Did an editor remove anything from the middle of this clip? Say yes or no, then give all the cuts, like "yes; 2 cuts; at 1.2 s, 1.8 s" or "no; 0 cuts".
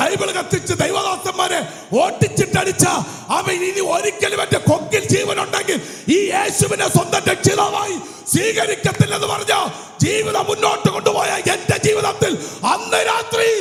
no; 0 cuts